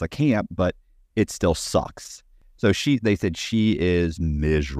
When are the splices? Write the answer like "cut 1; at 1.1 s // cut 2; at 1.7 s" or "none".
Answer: cut 1; at 2.4 s